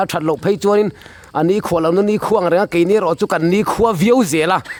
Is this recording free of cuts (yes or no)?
yes